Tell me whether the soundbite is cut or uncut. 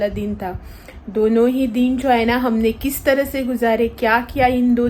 uncut